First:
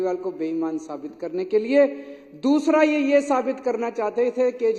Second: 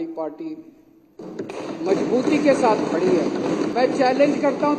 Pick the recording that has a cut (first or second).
second